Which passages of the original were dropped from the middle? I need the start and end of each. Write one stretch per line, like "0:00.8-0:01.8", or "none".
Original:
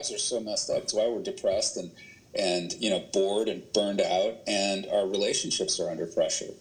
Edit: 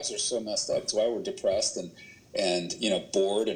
none